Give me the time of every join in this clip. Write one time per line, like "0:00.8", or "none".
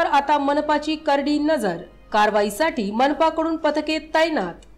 none